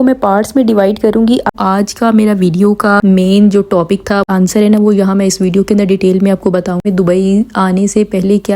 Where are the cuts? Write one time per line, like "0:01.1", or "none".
0:01.5
0:04.3
0:06.8